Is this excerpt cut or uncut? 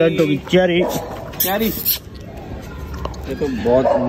uncut